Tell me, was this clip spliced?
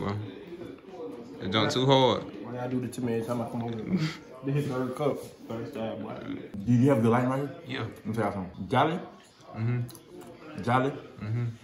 yes; 2 cuts; at 6.5 s, 8.6 s

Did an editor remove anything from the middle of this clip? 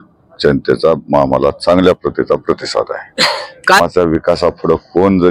yes; 1 cut; at 3.8 s

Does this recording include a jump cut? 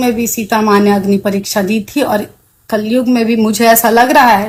no; 0 cuts

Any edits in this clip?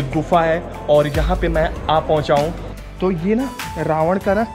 yes; 1 cut; at 2.5 s

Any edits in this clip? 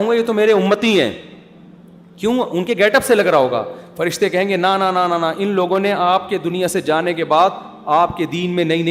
no; 0 cuts

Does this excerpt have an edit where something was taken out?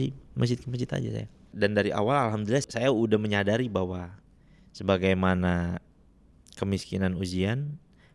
yes; 2 cuts; at 1.5 s, 2.6 s

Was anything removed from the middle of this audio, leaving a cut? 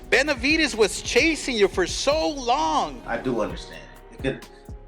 yes; 1 cut; at 3.0 s

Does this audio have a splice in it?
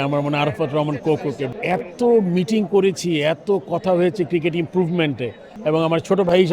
yes; 2 cuts; at 1.5 s, 5.4 s

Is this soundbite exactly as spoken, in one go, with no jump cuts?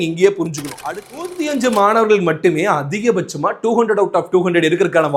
no; 1 cut; at 1.3 s

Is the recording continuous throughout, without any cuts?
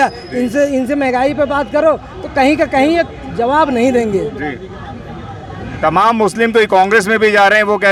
yes; 0 cuts

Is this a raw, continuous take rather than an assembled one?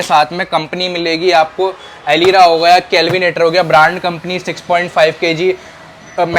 yes; 0 cuts

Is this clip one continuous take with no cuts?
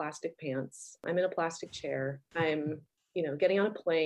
no; 2 cuts; at 2.2 s, 2.9 s

